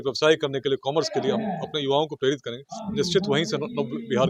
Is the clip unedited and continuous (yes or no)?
yes